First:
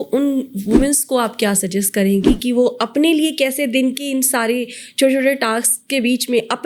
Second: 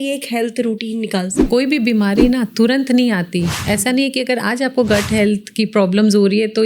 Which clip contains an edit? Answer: second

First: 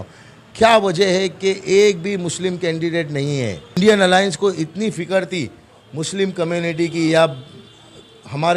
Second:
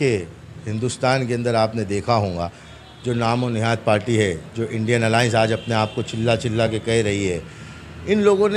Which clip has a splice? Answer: first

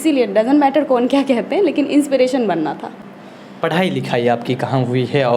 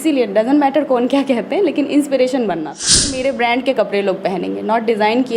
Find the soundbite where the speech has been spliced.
second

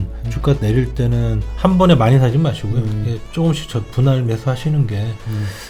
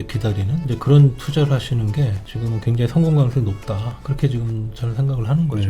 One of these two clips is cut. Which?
second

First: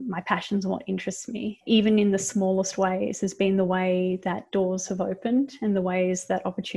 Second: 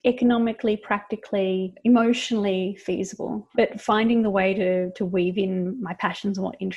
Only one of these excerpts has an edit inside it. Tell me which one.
second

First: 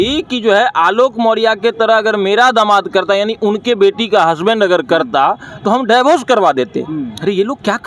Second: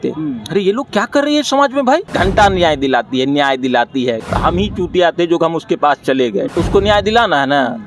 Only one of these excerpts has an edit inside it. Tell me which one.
second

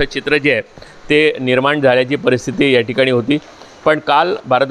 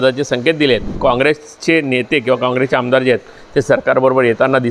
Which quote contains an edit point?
second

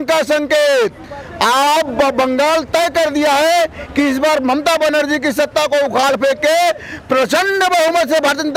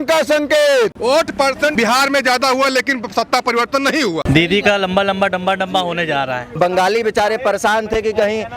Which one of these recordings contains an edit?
second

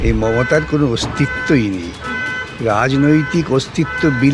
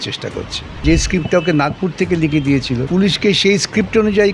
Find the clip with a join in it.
second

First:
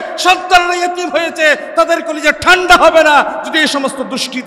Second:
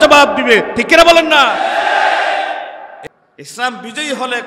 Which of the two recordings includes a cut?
second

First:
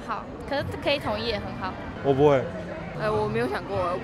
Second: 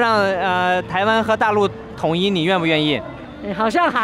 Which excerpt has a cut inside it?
first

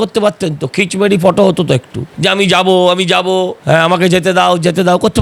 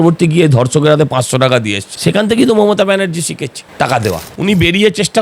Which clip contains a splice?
second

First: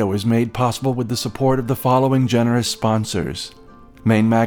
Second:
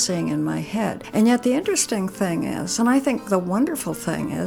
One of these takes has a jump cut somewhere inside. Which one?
second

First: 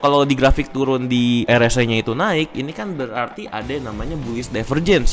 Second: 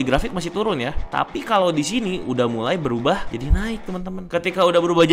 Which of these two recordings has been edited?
second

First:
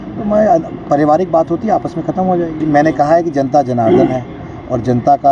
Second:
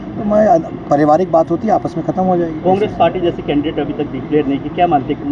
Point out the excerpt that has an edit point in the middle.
first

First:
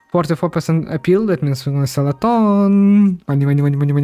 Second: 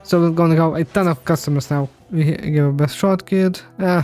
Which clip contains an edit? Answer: second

